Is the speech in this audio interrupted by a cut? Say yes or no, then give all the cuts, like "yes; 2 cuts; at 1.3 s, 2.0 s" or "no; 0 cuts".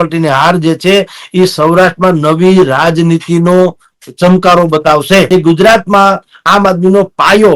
yes; 1 cut; at 5.3 s